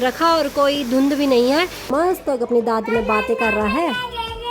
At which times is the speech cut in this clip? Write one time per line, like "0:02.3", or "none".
0:01.9